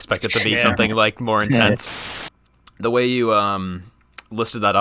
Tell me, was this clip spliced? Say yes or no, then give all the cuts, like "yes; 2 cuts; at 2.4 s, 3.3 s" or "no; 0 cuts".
yes; 1 cut; at 2.0 s